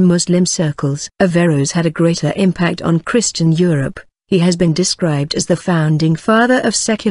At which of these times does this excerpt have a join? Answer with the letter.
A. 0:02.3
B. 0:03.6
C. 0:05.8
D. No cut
B